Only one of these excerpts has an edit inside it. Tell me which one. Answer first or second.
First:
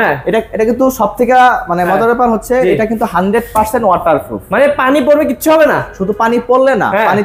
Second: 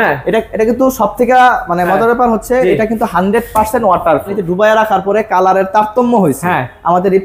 second